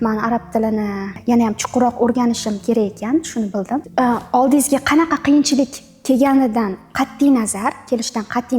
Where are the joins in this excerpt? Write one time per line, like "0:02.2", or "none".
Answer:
0:03.9